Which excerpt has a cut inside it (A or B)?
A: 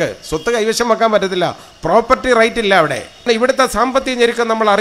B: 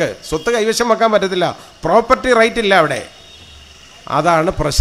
A